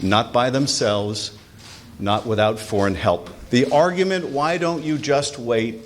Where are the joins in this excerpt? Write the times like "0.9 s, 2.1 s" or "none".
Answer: 3.3 s